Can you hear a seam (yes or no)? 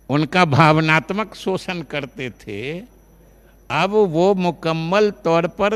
no